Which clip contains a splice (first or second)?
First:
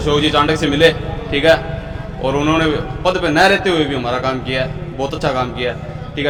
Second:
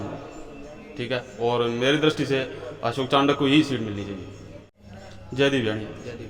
second